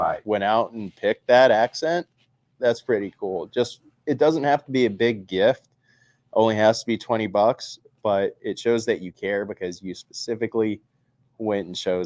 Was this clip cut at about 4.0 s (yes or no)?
no